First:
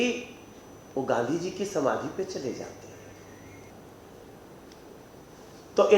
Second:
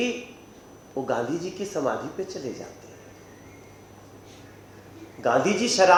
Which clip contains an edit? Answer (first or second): first